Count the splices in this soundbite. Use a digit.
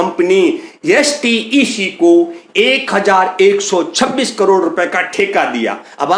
0